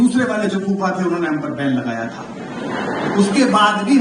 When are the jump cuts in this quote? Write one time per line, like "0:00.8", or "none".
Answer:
none